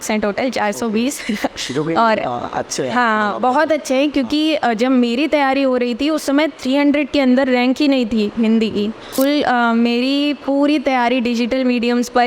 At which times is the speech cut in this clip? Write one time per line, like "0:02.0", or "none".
0:09.1

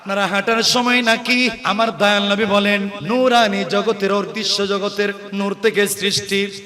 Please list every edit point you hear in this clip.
0:01.6
0:02.9
0:05.2

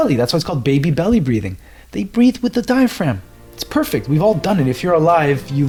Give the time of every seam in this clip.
none

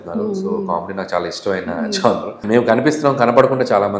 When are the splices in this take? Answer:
0:02.4

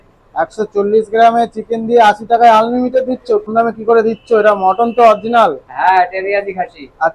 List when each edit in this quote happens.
0:03.5

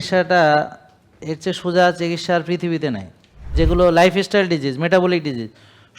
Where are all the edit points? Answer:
0:03.5

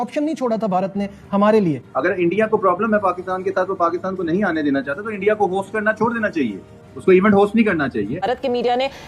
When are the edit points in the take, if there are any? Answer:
0:01.9
0:08.2

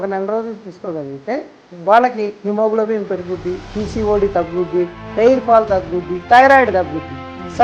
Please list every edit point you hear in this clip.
none

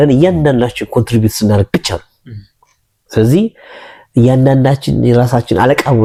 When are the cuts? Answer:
none

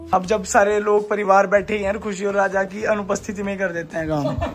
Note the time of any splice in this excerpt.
none

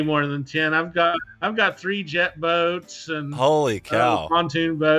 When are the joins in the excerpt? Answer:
0:01.1

